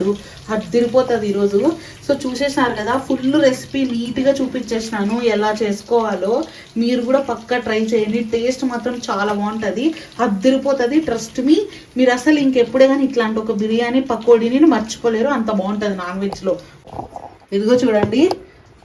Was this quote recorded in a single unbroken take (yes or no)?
no